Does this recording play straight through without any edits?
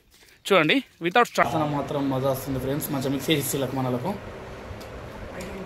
no; 1 cut; at 1.4 s

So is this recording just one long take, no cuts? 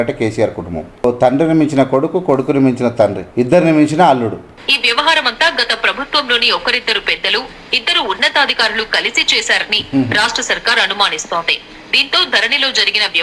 no; 3 cuts; at 1.0 s, 3.2 s, 4.5 s

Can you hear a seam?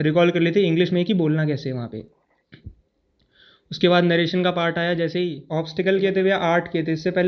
yes; 1 cut; at 5.4 s

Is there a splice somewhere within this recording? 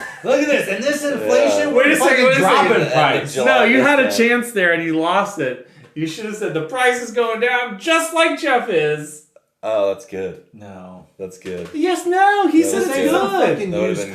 no; 0 cuts

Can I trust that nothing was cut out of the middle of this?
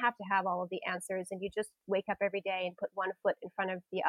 yes; 0 cuts

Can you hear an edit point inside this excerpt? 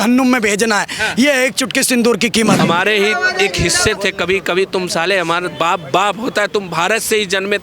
yes; 1 cut; at 2.6 s

